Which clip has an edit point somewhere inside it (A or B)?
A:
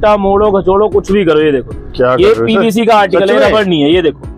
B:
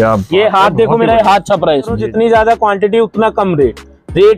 B